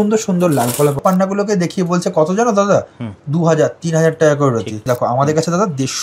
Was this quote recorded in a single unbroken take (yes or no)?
no